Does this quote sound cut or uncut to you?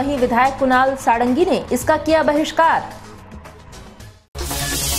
uncut